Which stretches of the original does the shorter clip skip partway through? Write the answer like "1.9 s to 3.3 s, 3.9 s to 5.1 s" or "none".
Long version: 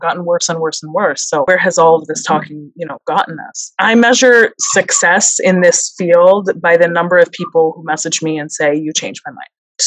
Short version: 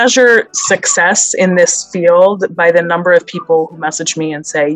none